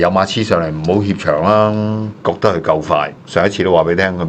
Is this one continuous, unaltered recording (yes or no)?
no